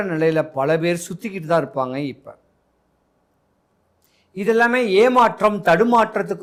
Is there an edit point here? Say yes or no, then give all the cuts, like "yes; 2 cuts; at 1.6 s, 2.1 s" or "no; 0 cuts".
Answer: no; 0 cuts